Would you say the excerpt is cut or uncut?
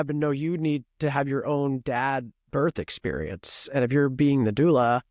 uncut